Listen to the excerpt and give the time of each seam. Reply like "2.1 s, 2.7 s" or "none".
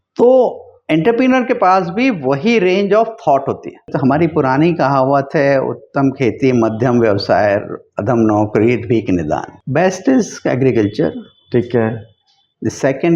3.9 s